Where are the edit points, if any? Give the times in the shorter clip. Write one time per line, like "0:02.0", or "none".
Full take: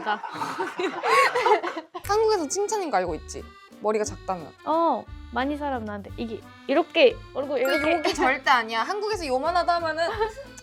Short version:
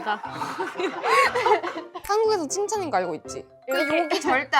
0:03.7